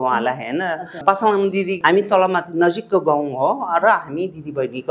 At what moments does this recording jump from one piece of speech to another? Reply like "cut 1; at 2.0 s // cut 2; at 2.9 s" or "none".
cut 1; at 1.3 s